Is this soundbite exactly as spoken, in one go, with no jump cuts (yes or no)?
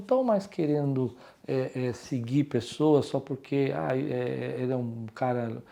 yes